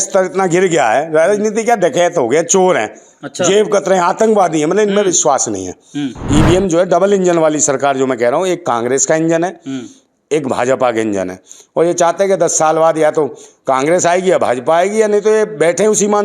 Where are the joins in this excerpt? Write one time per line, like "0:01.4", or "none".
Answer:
0:06.3